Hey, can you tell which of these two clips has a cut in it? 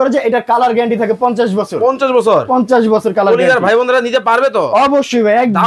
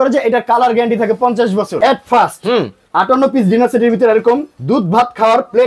second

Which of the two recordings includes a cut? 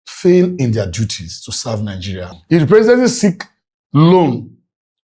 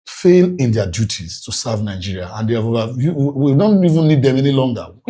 first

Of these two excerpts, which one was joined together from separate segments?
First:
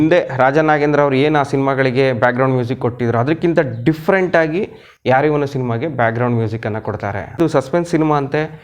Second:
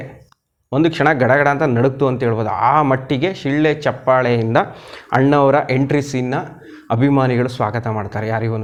first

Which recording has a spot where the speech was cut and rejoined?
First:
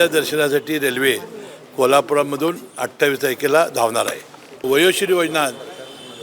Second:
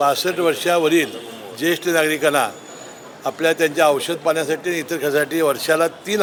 first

